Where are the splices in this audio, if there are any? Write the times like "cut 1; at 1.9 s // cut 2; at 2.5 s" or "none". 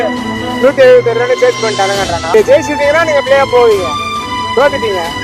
cut 1; at 2.3 s